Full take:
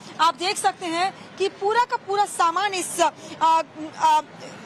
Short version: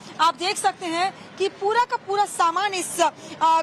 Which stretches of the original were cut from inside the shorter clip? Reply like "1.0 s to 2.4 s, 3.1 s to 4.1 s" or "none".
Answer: none